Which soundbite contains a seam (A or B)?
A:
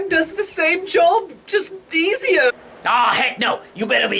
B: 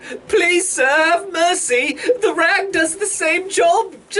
A